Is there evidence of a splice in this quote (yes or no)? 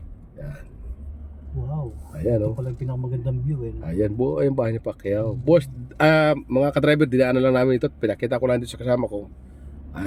no